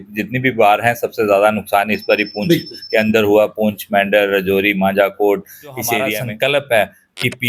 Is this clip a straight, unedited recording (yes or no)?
no